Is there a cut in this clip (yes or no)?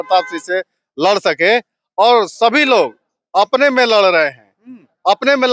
no